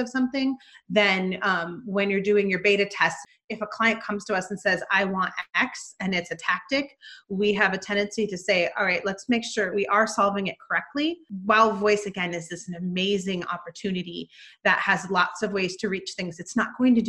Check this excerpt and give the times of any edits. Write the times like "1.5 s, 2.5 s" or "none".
3.2 s, 9.7 s, 11.3 s